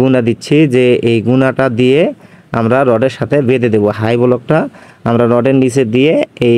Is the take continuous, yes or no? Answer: yes